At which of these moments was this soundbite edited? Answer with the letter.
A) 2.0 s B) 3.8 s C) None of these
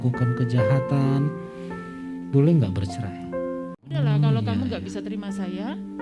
B